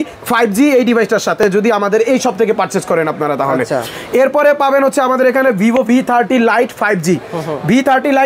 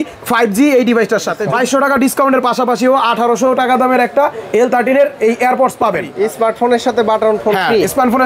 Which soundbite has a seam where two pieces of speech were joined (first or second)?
second